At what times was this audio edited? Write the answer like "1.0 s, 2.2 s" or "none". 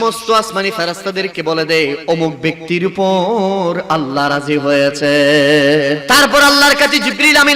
6.0 s